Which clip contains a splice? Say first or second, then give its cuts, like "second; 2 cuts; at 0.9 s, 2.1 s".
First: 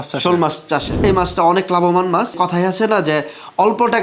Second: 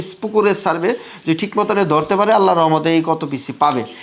first; 2 cuts; at 1.0 s, 2.4 s